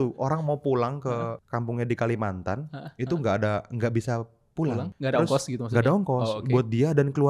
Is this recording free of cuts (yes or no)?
no